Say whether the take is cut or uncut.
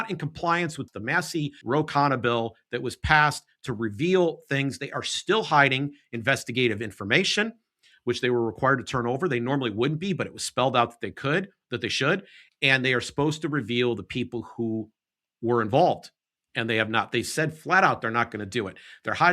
cut